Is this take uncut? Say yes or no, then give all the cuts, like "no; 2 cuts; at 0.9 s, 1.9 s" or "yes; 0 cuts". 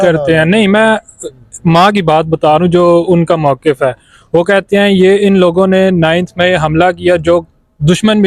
yes; 0 cuts